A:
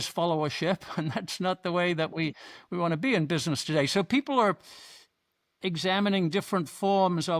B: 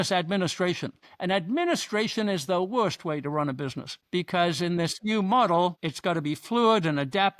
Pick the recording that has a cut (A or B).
B